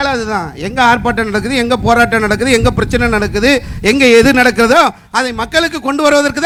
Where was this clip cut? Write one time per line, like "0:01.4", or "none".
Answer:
none